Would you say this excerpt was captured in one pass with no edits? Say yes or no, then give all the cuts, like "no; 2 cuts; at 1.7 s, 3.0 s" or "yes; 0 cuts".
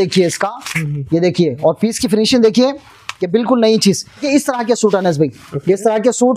no; 1 cut; at 4.2 s